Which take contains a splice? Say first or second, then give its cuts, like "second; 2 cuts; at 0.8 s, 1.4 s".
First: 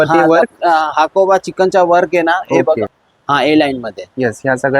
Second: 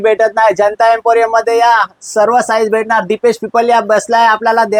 first; 1 cut; at 3.0 s